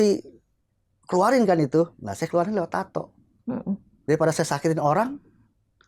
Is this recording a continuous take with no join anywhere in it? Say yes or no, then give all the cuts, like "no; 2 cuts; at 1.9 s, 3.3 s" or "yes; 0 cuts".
yes; 0 cuts